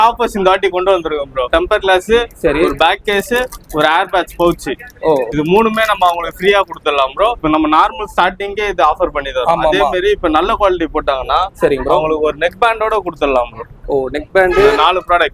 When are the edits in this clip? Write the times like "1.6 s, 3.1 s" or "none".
1.5 s, 7.4 s